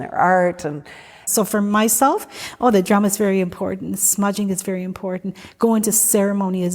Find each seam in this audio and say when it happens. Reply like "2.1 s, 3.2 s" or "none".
1.3 s